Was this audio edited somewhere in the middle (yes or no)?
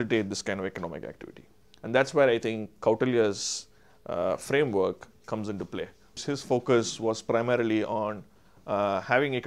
yes